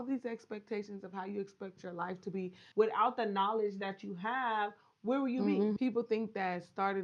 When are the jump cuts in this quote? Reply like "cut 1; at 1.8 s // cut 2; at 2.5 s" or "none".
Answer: cut 1; at 2.6 s // cut 2; at 5.8 s